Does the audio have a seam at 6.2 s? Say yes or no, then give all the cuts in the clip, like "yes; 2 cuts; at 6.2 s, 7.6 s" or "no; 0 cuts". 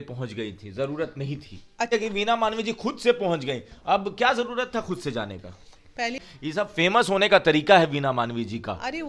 yes; 2 cuts; at 1.9 s, 6.2 s